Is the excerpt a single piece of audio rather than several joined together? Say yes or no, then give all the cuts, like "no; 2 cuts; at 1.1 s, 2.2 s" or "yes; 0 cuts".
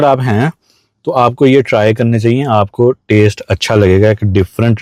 yes; 0 cuts